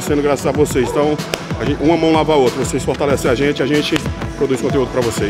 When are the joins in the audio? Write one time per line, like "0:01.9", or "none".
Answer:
none